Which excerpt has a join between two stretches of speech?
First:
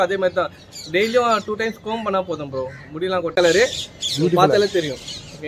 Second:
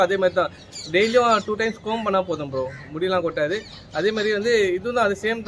first; 1 cut; at 3.3 s

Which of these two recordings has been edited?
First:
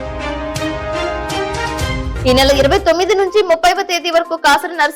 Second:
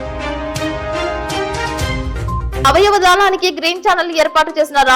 first; 1 cut; at 2.1 s

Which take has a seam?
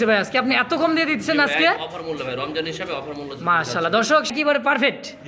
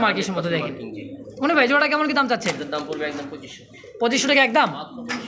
first; 1 cut; at 4.3 s

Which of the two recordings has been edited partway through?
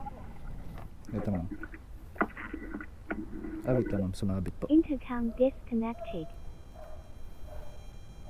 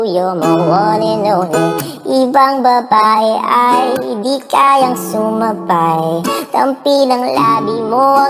first; 1 cut; at 0.9 s

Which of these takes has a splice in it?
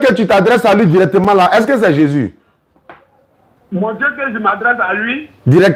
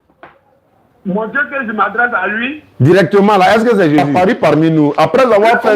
second; 1 cut; at 4.1 s

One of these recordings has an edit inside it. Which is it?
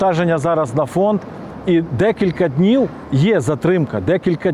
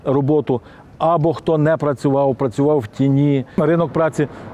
second; 1 cut; at 3.6 s

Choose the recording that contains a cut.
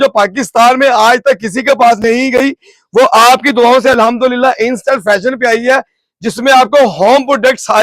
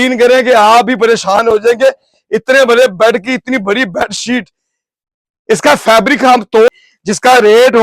second; 1 cut; at 6.7 s

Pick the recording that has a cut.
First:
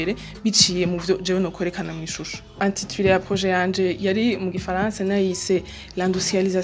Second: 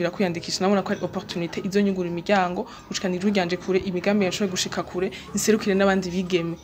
first; 1 cut; at 2.6 s

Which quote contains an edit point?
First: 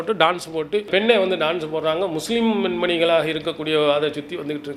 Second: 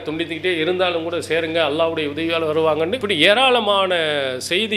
second; 1 cut; at 3.0 s

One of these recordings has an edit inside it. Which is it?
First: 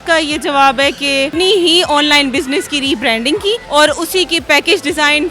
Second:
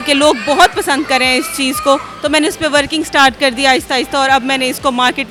first; 2 cuts; at 1.3 s, 3.6 s

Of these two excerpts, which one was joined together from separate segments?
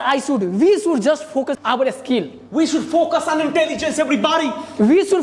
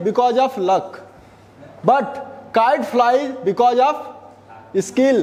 first; 1 cut; at 1.6 s

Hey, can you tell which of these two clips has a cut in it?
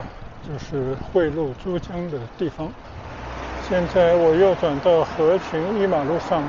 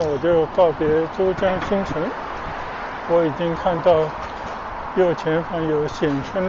first; 1 cut; at 3.0 s

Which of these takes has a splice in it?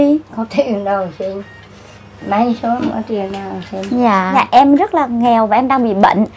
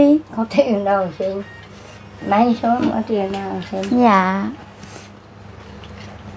first; 1 cut; at 4.3 s

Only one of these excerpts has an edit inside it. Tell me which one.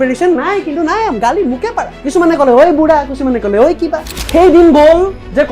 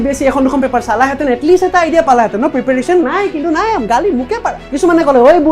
first; 1 cut; at 4.1 s

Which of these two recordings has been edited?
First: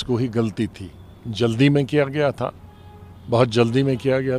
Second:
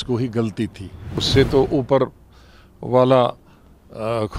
second; 1 cut; at 1.2 s

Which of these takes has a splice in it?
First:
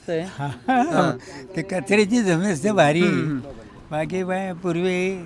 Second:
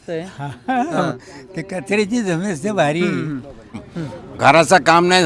second; 1 cut; at 3.9 s

